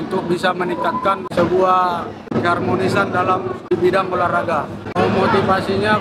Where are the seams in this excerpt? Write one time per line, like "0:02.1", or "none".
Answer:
0:04.8

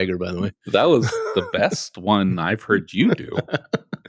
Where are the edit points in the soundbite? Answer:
none

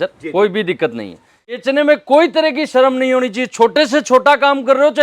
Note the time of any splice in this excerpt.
0:01.6

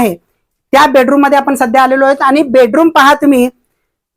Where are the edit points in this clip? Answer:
none

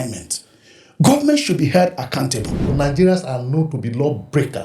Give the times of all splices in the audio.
0:02.7

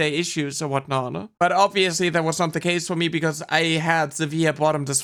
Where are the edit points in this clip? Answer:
none

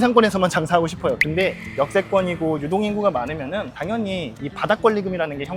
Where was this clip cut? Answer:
none

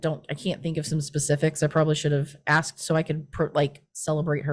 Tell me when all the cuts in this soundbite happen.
none

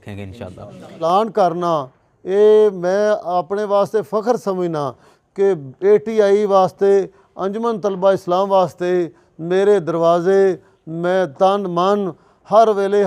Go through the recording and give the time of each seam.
0:01.0

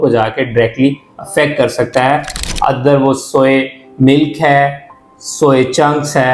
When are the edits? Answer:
0:02.4

